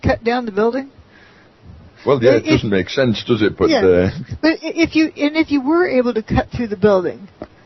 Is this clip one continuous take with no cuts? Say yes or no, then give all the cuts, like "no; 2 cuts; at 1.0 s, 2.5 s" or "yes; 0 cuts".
no; 1 cut; at 5.7 s